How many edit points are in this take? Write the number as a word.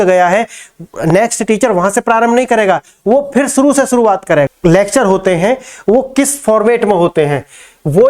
one